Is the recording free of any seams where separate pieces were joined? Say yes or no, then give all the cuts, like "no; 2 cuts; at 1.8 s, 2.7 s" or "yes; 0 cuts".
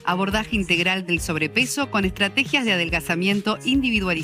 yes; 0 cuts